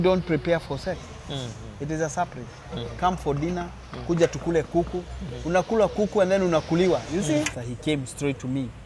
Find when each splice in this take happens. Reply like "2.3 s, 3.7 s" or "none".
7.5 s